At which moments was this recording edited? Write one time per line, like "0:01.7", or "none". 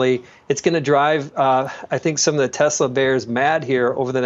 none

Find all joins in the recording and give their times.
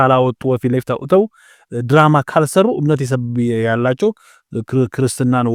none

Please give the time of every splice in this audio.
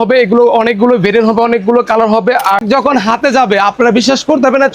0:02.6

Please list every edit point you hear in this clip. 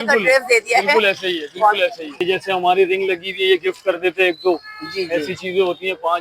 0:02.2

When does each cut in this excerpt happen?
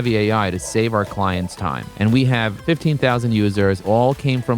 0:01.8
0:02.6
0:03.8

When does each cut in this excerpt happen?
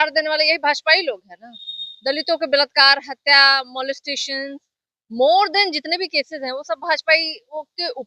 none

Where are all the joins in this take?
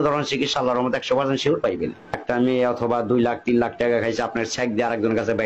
0:01.6

